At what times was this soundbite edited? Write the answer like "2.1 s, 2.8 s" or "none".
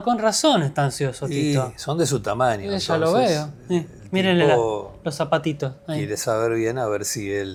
none